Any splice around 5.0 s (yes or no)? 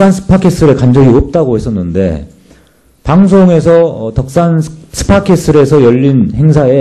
no